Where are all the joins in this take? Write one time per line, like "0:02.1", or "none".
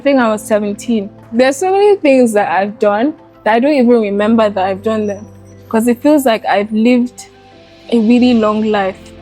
0:01.2